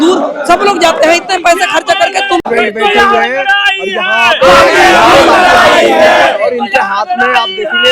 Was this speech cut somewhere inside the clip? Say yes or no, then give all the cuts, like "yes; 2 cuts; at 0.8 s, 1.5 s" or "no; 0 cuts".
yes; 1 cut; at 2.4 s